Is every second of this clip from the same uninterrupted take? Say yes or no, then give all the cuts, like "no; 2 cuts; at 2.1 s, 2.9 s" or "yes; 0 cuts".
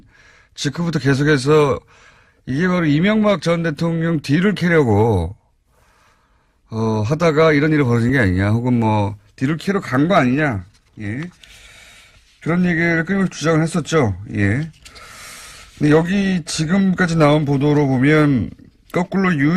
yes; 0 cuts